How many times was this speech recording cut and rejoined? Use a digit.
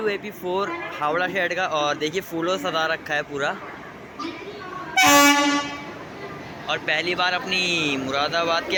0